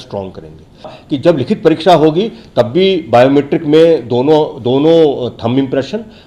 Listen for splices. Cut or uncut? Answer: cut